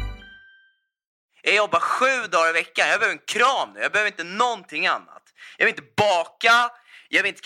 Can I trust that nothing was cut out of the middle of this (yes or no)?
no